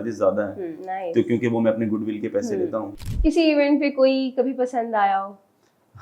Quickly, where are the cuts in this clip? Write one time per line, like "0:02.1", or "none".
0:02.9

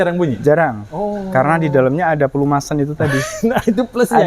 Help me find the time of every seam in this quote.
none

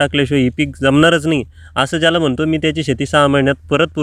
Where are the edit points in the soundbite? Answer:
none

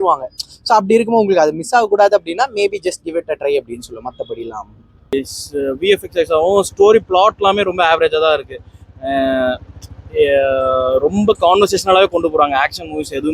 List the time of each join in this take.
0:05.1

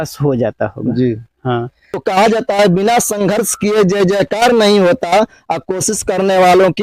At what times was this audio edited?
0:01.8

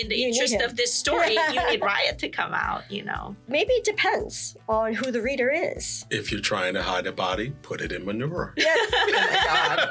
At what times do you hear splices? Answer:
0:03.4

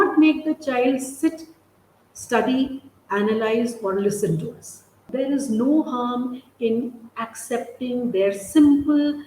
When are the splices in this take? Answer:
0:05.0

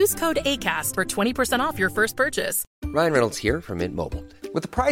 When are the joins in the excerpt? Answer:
0:02.6

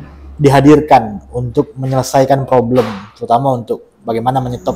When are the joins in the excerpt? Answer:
none

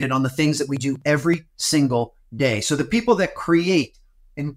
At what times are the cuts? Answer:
0:01.5

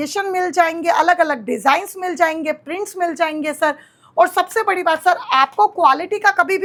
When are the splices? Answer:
none

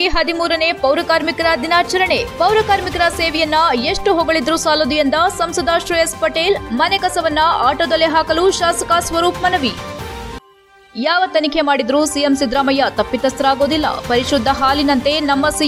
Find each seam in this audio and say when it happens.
none

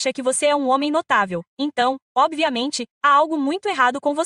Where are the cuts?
none

